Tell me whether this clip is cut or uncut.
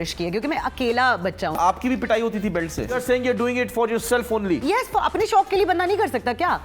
cut